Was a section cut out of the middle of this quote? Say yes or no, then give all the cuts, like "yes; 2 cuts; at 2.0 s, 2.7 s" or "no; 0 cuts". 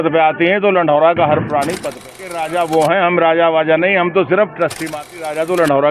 yes; 2 cuts; at 1.9 s, 4.9 s